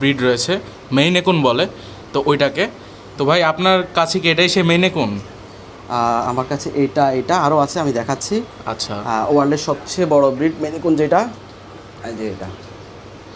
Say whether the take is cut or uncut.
uncut